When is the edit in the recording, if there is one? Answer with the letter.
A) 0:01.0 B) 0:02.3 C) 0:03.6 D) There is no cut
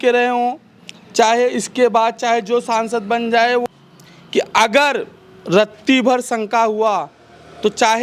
C